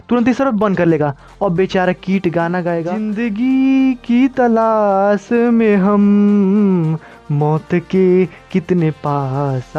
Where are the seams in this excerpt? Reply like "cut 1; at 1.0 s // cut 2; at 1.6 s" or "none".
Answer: cut 1; at 3.1 s